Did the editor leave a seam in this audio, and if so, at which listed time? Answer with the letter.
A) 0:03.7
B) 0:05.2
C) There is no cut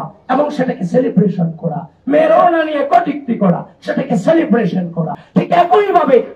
B